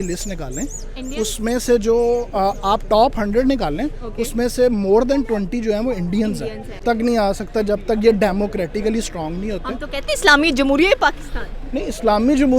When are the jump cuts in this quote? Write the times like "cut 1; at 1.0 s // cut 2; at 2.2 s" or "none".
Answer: cut 1; at 6.8 s